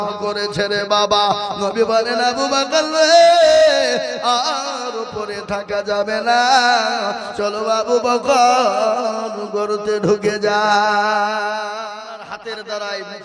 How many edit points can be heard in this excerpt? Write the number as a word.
one